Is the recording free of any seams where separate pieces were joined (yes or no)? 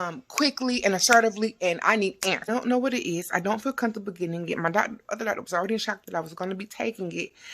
no